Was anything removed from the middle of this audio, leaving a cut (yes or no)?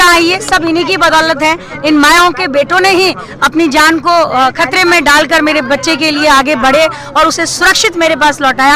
no